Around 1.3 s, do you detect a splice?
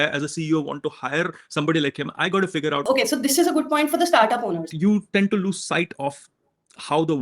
no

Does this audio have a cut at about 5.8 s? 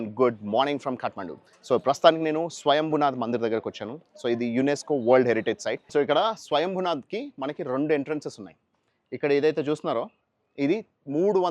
yes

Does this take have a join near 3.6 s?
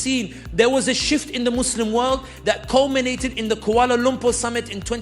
no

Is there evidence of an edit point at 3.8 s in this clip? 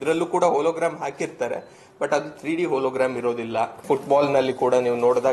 yes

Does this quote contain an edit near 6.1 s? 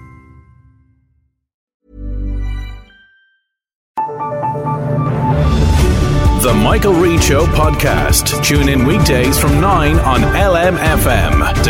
no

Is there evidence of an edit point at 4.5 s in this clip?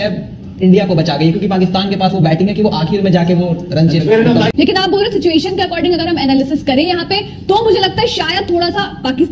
yes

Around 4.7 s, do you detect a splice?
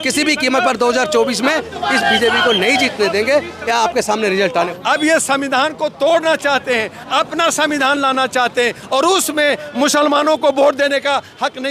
yes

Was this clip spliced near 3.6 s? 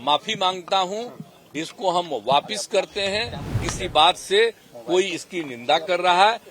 yes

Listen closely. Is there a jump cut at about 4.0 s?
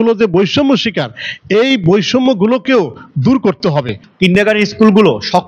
yes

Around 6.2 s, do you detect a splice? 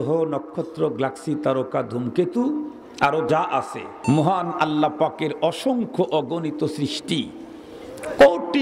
no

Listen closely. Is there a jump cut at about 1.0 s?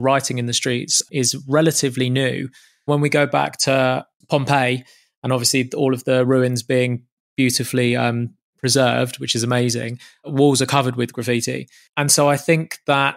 yes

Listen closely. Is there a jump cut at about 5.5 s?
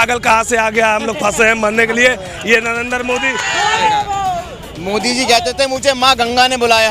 no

